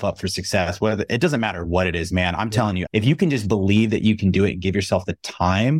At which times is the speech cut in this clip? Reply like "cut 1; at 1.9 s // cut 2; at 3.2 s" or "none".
cut 1; at 2.8 s